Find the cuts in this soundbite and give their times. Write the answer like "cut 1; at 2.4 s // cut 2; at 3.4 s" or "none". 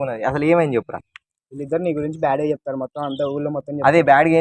none